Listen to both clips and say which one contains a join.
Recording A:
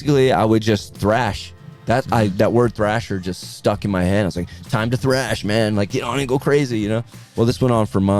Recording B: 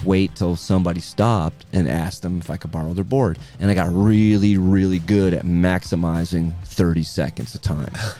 A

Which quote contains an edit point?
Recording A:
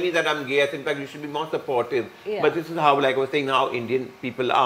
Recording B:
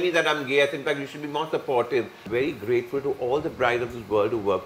B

